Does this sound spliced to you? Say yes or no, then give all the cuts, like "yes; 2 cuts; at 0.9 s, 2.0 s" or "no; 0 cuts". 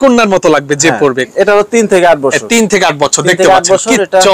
yes; 1 cut; at 1.3 s